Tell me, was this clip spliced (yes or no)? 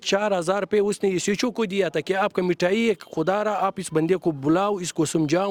no